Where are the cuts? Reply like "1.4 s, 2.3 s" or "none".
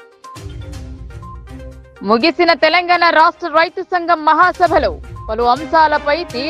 1.3 s